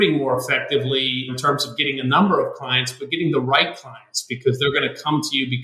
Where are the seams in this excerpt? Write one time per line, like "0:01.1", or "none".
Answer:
0:01.3